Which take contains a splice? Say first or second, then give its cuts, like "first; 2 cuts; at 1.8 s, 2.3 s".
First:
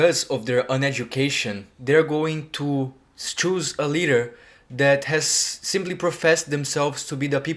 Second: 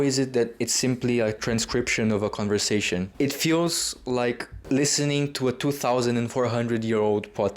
second; 3 cuts; at 1.4 s, 3.1 s, 4.5 s